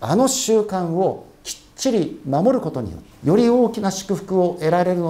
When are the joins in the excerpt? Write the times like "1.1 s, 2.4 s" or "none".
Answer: 3.0 s